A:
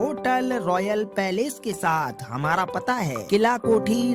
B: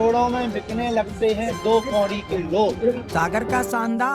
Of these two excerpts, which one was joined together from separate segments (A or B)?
B